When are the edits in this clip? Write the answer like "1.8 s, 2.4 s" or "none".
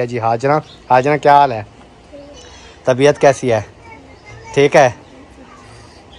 none